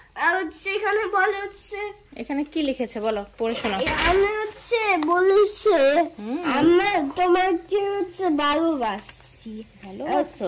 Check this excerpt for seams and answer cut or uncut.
uncut